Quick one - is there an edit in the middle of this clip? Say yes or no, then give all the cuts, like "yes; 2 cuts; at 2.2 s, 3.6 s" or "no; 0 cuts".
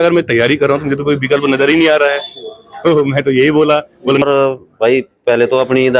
yes; 1 cut; at 4.2 s